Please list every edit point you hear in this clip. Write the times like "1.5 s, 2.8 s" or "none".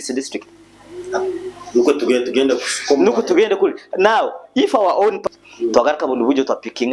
5.2 s